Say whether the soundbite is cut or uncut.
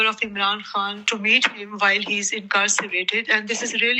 cut